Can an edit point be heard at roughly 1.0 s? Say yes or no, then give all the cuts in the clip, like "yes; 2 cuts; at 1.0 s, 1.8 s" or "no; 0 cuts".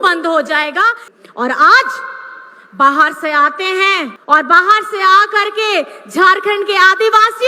yes; 2 cuts; at 1.0 s, 4.1 s